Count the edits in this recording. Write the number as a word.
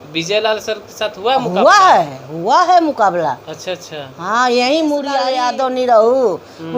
one